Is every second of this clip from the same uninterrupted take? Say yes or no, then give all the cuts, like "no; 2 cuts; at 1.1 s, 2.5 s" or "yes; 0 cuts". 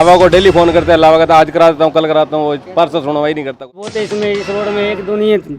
no; 1 cut; at 3.8 s